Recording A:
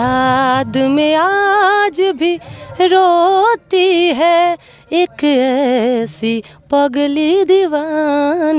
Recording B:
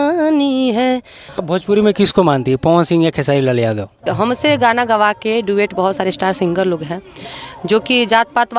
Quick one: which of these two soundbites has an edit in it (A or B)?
B